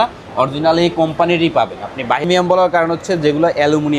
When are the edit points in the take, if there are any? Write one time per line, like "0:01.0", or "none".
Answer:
0:02.3